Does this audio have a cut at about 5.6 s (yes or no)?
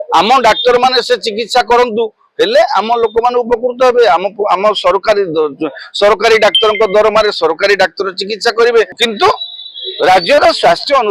no